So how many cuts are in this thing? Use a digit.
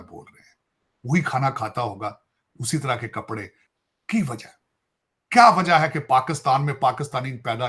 1